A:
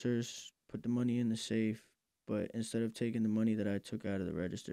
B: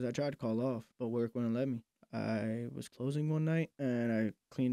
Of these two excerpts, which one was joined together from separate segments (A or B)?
B